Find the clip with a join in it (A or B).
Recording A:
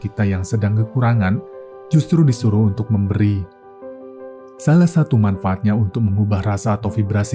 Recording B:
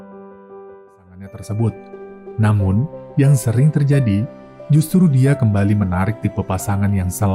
B